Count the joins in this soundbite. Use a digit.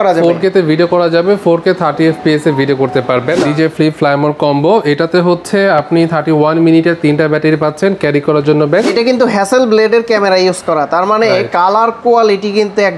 2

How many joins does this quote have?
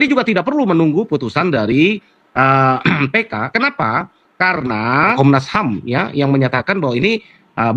1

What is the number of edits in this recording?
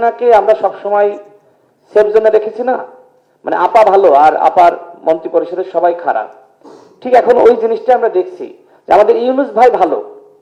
0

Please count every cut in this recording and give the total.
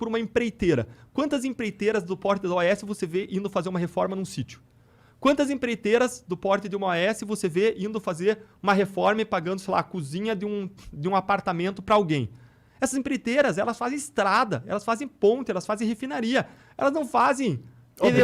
0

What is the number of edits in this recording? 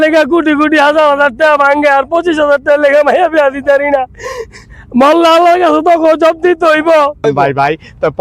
1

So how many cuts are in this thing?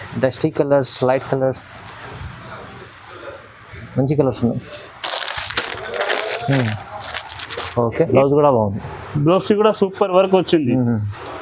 1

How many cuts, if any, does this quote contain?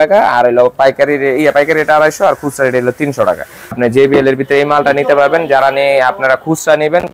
1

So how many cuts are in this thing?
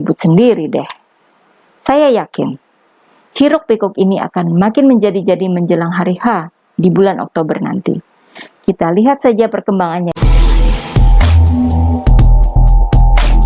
1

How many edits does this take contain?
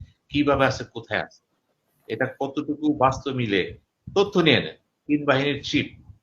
1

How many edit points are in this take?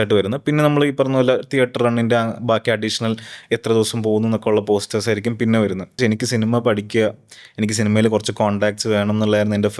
1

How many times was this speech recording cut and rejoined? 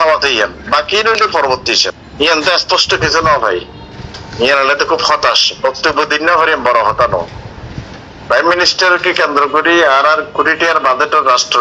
1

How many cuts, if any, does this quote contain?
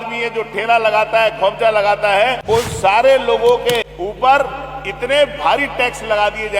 2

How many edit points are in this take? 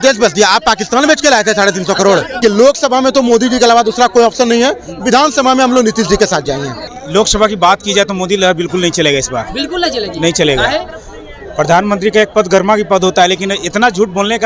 2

